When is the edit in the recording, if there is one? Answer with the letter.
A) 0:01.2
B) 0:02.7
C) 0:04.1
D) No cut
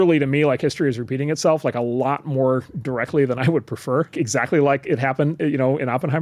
C